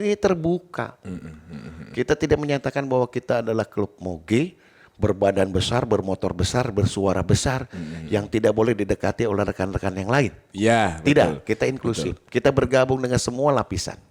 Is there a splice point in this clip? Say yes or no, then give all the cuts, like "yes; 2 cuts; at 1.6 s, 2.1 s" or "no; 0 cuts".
no; 0 cuts